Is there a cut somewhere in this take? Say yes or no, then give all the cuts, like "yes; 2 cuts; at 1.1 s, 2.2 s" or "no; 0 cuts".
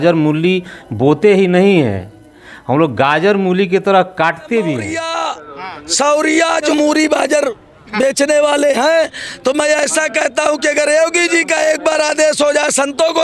yes; 2 cuts; at 5.0 s, 6.7 s